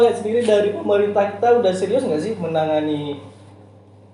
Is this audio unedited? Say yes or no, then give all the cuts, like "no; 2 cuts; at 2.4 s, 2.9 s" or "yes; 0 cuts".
yes; 0 cuts